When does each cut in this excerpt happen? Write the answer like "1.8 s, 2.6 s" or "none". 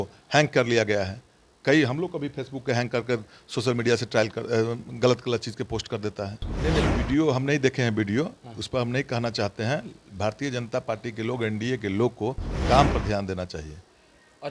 6.5 s